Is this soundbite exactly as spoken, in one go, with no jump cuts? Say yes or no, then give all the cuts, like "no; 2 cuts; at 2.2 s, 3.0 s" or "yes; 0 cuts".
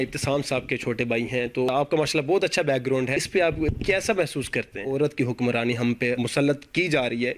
no; 4 cuts; at 1.7 s, 3.5 s, 4.8 s, 6.2 s